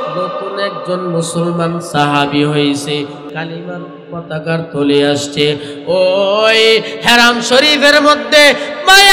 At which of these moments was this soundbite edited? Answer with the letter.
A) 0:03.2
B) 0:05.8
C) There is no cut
A